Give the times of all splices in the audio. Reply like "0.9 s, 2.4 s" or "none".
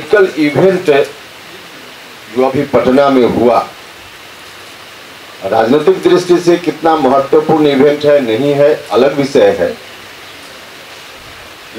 none